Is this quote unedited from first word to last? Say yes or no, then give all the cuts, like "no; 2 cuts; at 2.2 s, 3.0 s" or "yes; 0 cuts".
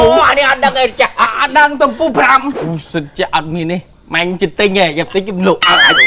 no; 1 cut; at 2.6 s